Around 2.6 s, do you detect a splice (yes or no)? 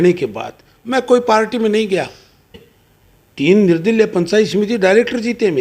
yes